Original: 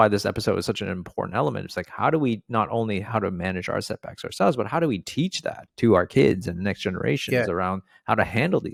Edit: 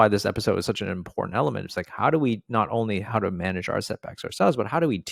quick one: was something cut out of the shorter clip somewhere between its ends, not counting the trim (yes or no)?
no